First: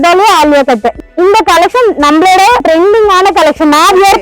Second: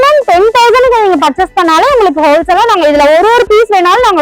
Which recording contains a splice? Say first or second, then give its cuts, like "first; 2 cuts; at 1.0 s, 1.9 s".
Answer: first; 2 cuts; at 0.9 s, 2.6 s